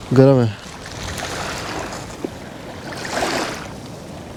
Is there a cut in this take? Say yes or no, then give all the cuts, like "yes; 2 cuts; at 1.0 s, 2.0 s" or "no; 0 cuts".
no; 0 cuts